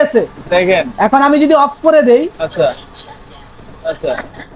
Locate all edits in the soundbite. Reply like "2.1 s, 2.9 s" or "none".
none